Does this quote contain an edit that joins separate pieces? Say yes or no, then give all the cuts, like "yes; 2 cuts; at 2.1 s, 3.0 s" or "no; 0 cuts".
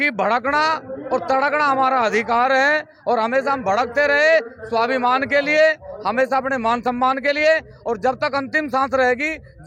no; 0 cuts